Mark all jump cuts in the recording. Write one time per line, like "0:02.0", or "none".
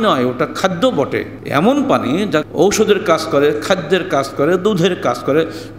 0:01.4
0:02.5

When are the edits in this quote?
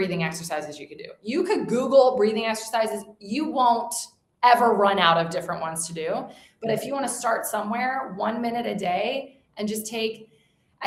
none

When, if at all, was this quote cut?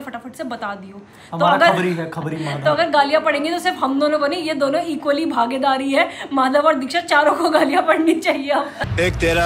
none

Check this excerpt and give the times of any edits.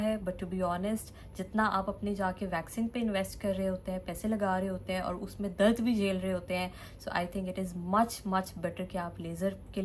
none

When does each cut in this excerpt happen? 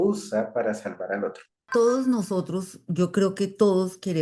0:01.6

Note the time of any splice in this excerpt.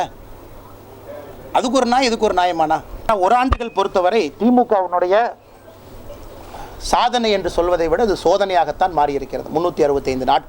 0:02.9

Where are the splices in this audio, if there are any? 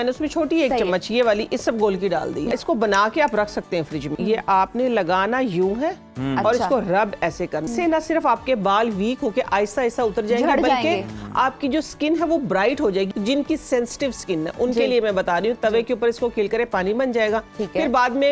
0:02.5
0:04.1
0:07.7
0:13.1

